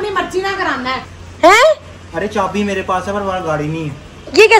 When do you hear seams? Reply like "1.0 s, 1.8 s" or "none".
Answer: 1.1 s